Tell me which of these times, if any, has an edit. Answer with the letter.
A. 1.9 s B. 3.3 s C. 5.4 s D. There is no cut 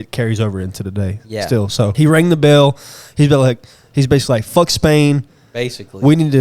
A